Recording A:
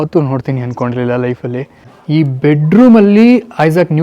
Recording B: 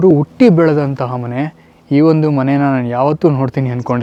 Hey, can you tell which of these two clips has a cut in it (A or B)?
A